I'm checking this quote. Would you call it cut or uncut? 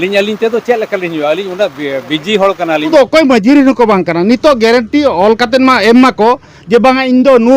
cut